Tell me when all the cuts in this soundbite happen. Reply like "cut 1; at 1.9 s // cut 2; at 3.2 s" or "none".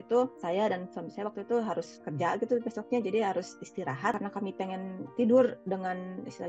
cut 1; at 4.2 s